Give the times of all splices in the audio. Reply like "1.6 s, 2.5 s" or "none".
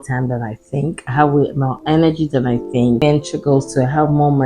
3.0 s